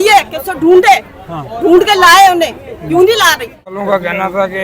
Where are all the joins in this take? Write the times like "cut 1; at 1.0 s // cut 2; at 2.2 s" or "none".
cut 1; at 3.7 s